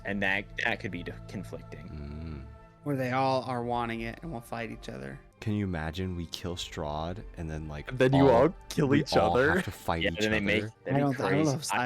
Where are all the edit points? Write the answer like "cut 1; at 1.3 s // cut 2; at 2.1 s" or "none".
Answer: cut 1; at 2.6 s // cut 2; at 5.3 s // cut 3; at 10.7 s